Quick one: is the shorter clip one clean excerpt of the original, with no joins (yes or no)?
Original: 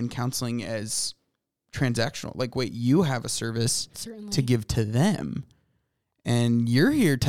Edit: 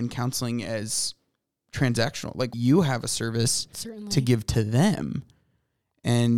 no